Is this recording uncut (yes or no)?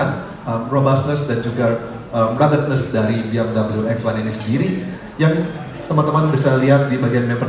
yes